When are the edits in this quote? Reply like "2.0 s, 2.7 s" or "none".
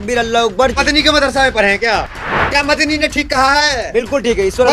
2.1 s